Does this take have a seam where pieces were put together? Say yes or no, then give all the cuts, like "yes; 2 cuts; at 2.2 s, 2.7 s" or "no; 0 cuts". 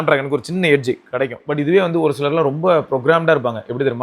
yes; 1 cut; at 1.5 s